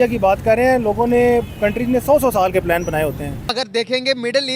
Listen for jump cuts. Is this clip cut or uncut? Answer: cut